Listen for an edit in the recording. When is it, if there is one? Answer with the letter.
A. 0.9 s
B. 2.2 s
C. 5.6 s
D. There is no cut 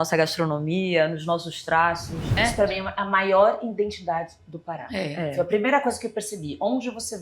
B